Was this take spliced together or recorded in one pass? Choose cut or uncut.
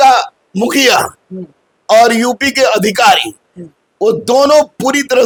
uncut